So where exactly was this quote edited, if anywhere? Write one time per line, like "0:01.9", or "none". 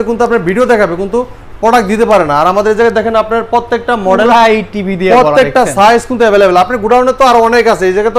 none